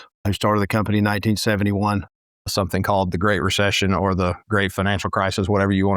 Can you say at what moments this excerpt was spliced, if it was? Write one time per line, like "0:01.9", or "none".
0:02.1